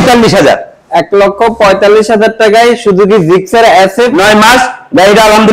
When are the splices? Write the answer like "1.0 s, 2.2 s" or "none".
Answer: 4.1 s